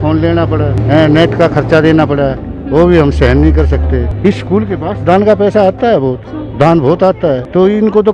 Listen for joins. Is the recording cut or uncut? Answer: cut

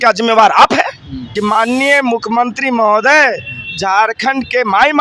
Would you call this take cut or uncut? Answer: cut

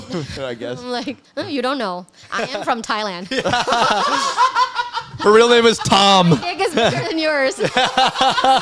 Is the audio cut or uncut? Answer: uncut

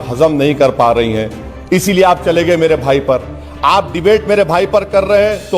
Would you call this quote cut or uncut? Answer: uncut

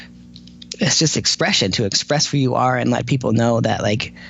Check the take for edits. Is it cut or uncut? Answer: uncut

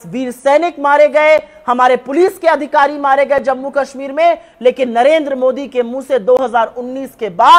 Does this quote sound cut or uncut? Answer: uncut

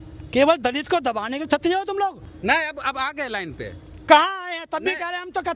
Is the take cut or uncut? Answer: cut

